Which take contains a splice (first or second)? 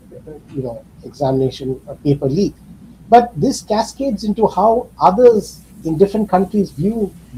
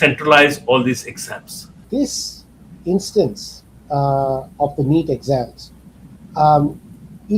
second